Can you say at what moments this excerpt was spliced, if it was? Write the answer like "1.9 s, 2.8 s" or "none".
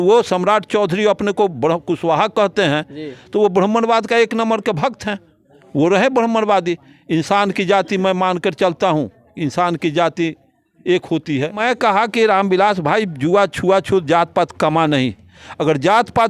11.6 s